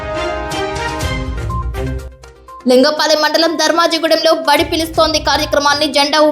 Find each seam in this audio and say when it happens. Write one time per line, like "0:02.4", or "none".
0:02.1